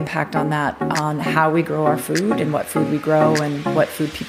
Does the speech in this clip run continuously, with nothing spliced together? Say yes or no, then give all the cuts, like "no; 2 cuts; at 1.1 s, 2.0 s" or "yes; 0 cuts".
yes; 0 cuts